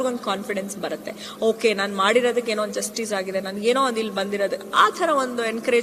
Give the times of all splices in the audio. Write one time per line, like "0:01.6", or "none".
none

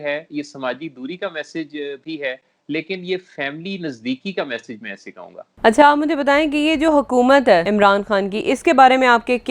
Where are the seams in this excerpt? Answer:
0:05.4
0:07.7

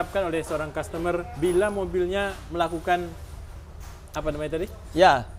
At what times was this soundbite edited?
none

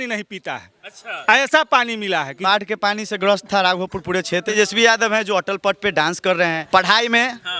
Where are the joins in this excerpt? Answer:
0:02.3
0:04.5
0:06.6

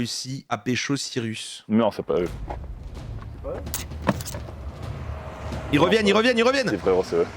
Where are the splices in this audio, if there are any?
0:01.5
0:04.8

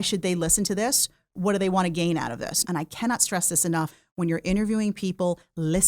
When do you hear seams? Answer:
0:02.6
0:04.0

